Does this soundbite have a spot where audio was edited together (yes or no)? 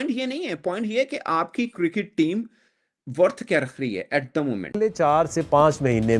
yes